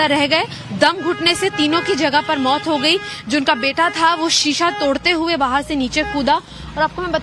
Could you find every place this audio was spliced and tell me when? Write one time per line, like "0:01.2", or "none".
0:05.7